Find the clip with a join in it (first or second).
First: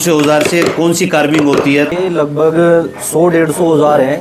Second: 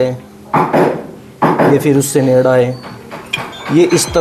first